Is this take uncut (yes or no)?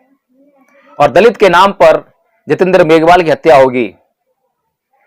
yes